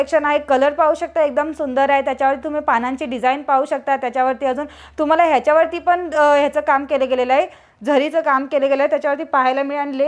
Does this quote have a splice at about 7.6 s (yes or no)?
no